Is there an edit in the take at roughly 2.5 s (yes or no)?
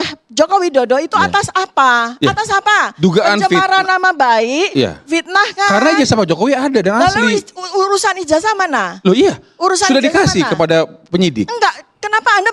no